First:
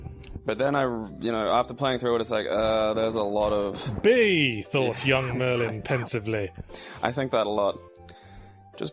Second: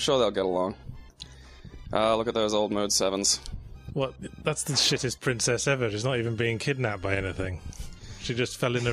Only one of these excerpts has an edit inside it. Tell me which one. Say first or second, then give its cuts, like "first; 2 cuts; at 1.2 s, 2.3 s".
first; 1 cut; at 7.8 s